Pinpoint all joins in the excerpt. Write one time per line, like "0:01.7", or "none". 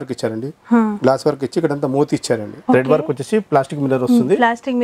0:02.5